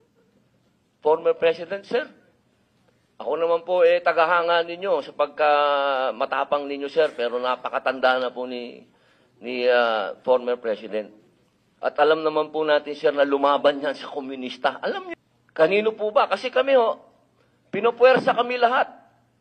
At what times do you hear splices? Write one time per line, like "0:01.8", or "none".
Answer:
0:15.1